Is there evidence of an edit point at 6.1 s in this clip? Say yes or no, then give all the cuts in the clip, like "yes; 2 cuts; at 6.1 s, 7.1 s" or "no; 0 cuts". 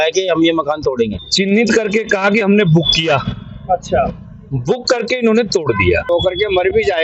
yes; 2 cuts; at 1.2 s, 6.1 s